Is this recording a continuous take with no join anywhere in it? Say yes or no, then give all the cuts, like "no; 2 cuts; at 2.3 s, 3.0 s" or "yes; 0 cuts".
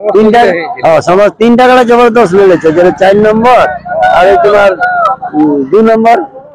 yes; 0 cuts